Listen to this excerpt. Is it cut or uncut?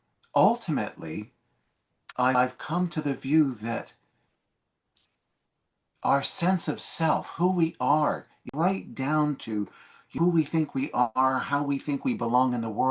cut